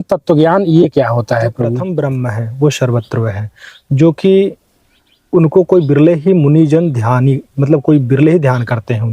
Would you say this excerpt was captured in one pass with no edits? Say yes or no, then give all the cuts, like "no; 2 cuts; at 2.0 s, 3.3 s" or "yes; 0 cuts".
no; 1 cut; at 1.8 s